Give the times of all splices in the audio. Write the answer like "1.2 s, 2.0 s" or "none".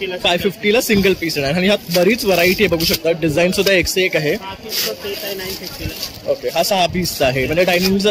none